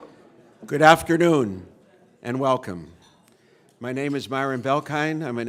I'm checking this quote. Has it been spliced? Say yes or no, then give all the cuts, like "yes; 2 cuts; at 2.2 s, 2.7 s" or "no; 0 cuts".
no; 0 cuts